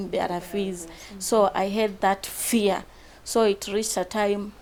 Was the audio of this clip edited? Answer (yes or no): no